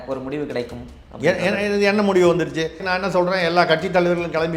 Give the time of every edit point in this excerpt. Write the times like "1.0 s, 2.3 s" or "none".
2.9 s